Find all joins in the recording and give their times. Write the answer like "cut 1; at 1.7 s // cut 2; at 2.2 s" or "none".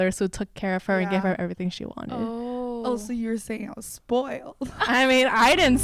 none